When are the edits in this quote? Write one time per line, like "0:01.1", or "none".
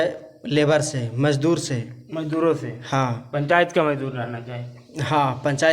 none